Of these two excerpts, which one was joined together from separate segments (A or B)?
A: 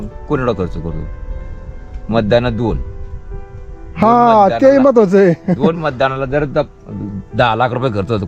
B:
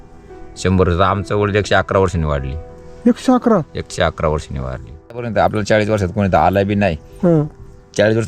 B